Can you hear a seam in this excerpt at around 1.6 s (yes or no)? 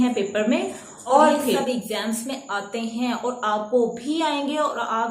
yes